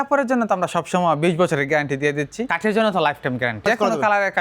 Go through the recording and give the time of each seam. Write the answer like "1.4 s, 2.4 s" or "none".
2.5 s, 3.6 s

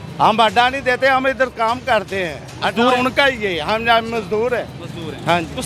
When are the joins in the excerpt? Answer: none

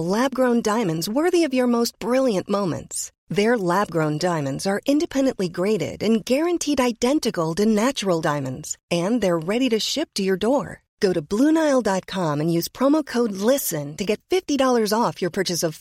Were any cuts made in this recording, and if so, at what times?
none

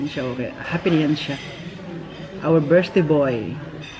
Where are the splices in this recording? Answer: none

